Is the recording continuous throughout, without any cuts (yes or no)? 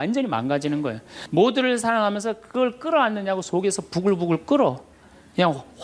no